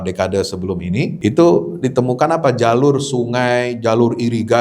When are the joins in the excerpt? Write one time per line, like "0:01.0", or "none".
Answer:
0:01.1